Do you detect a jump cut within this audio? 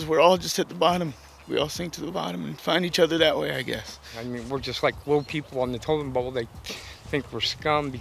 yes; 1 cut; at 4.2 s

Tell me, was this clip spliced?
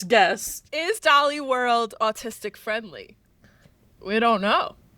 yes; 1 cut; at 0.9 s

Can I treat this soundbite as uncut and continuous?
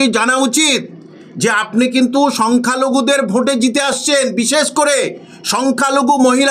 yes; 0 cuts

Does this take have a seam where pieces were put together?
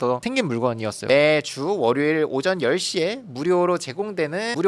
yes; 1 cut; at 0.9 s

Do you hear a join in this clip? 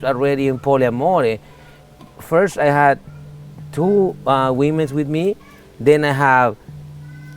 no; 0 cuts

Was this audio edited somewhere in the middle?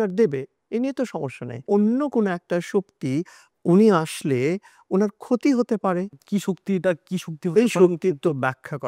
yes; 2 cuts; at 1.6 s, 3.4 s

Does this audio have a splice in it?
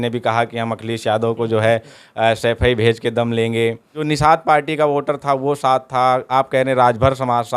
yes; 1 cut; at 4.0 s

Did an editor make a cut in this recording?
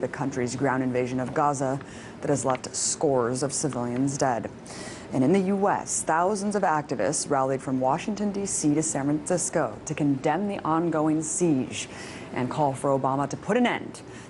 yes; 1 cut; at 0.9 s

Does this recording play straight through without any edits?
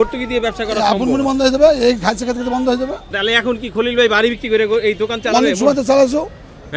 no; 1 cut; at 3.0 s

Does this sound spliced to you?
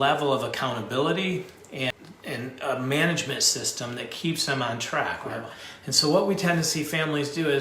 yes; 2 cuts; at 1.9 s, 5.3 s

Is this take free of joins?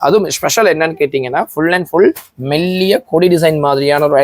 yes; 0 cuts

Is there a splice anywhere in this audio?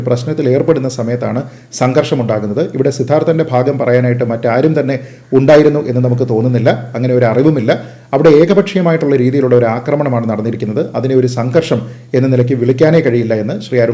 no; 0 cuts

